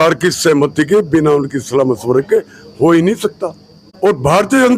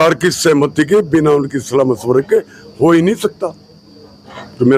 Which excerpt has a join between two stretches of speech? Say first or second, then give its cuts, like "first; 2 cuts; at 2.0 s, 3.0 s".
first; 1 cut; at 3.9 s